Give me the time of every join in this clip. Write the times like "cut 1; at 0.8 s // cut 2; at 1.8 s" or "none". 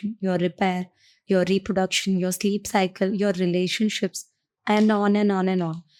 none